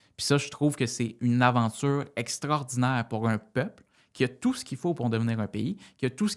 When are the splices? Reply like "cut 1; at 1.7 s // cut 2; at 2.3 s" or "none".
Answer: none